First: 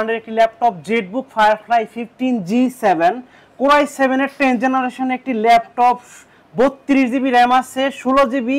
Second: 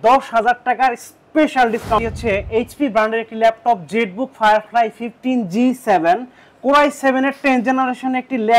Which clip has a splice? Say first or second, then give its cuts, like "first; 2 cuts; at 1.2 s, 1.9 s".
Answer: second; 1 cut; at 2.0 s